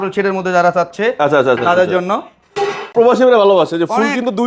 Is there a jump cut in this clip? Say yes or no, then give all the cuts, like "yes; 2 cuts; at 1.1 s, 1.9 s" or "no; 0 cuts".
yes; 1 cut; at 2.9 s